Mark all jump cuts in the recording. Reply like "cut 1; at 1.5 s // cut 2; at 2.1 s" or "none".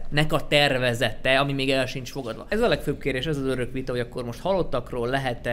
cut 1; at 2.3 s